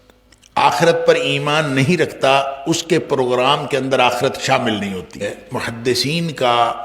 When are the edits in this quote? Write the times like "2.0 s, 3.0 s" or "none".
5.2 s